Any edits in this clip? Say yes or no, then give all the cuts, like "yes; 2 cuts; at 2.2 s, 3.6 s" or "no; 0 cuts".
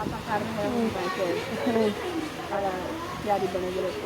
yes; 1 cut; at 2.6 s